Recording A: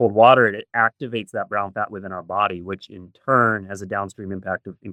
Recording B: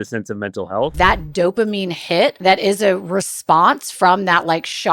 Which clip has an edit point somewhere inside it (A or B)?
B